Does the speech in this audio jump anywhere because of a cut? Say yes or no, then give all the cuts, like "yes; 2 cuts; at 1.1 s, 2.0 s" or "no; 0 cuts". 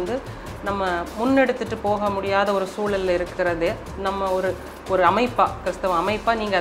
no; 0 cuts